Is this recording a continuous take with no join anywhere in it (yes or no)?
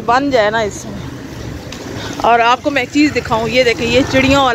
yes